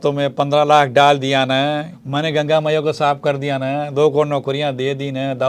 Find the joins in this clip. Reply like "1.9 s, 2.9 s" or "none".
2.0 s